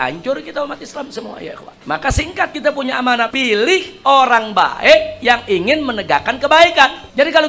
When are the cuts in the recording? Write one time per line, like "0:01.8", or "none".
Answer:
0:01.8
0:03.3